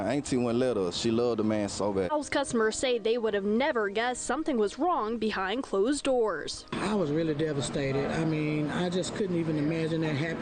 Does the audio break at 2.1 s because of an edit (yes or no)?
no